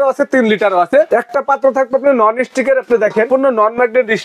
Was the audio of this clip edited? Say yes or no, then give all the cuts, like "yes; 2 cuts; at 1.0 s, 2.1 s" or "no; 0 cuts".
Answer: yes; 2 cuts; at 1.1 s, 3.3 s